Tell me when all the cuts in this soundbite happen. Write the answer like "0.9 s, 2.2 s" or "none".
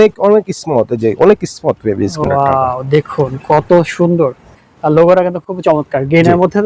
2.2 s, 4.6 s